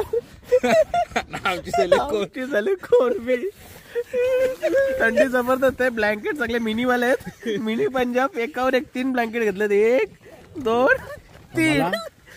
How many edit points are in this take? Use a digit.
0